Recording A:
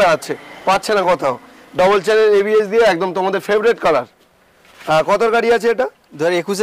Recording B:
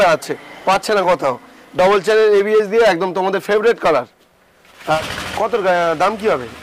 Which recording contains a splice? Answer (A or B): B